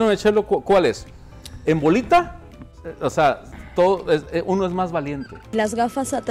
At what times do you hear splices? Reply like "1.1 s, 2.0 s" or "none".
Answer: none